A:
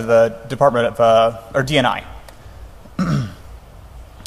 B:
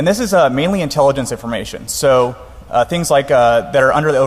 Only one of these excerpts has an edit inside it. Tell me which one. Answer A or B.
B